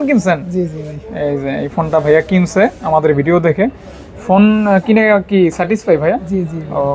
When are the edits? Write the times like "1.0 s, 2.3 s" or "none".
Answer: none